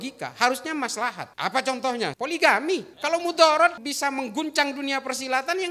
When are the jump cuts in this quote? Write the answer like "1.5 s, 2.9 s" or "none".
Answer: 1.3 s, 2.1 s, 2.9 s, 3.9 s